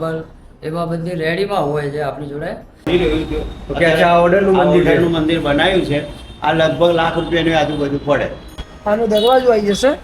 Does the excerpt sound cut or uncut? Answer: cut